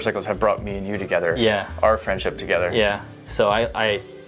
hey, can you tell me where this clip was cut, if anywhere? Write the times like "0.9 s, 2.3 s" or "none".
3.2 s